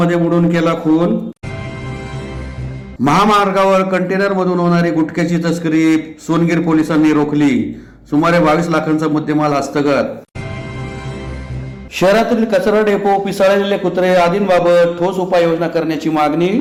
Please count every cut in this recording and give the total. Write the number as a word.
zero